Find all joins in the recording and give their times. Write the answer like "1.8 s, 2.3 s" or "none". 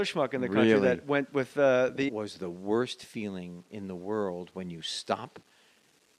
none